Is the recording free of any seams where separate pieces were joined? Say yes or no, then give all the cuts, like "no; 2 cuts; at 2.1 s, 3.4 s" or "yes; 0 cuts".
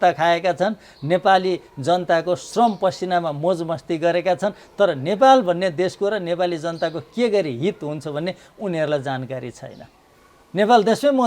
yes; 0 cuts